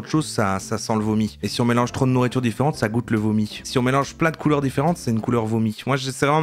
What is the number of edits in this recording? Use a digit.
0